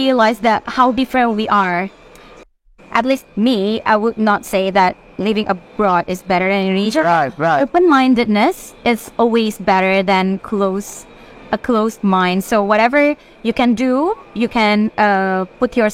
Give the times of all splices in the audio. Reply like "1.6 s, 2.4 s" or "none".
2.4 s